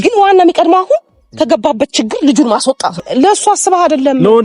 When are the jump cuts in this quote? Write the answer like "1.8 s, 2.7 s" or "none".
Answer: 3.0 s